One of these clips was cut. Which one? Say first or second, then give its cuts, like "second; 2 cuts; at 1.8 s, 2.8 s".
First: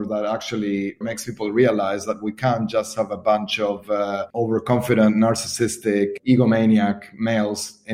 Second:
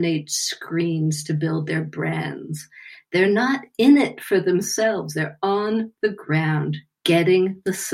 first; 2 cuts; at 1.0 s, 6.1 s